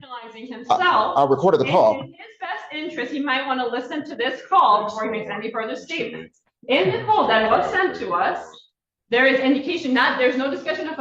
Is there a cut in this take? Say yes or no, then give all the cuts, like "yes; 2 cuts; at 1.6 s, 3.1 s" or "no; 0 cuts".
no; 0 cuts